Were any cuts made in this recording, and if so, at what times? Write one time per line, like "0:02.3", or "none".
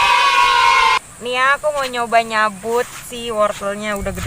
0:01.0